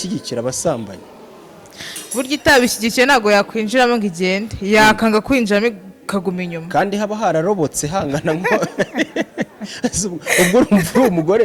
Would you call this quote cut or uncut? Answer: uncut